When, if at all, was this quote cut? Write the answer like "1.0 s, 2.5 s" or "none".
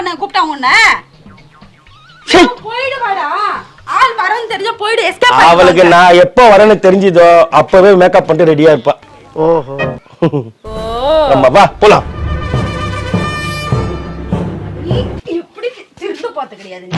none